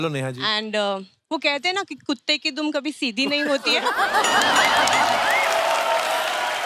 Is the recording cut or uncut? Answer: uncut